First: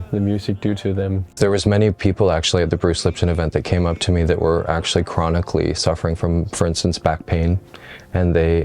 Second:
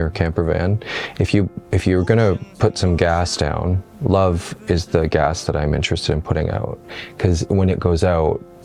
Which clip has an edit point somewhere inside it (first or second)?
first